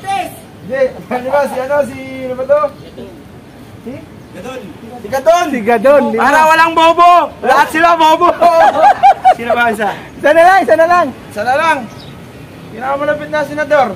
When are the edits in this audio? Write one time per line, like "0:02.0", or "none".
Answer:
none